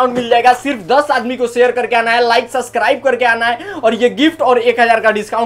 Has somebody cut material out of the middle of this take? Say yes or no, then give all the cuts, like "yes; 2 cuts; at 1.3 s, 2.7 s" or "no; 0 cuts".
no; 0 cuts